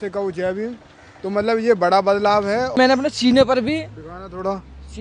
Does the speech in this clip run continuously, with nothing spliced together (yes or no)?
no